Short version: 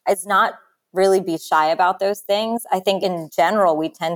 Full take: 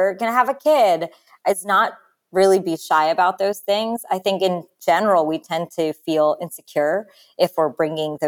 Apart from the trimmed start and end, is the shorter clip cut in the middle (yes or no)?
yes